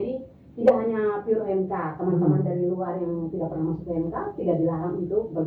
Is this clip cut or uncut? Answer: uncut